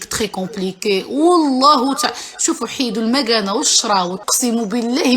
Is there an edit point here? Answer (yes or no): yes